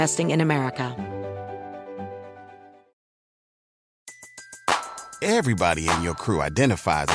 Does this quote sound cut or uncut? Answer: cut